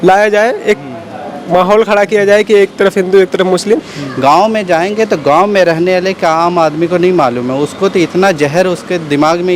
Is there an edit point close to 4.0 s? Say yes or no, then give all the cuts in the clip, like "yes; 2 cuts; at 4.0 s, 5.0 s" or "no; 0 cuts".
yes; 1 cut; at 4.0 s